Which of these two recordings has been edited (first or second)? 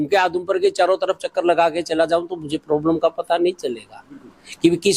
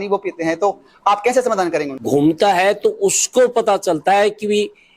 second